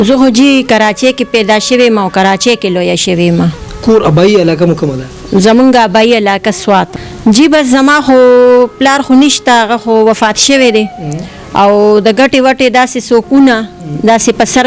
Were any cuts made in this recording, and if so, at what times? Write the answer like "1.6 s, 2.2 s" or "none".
7.0 s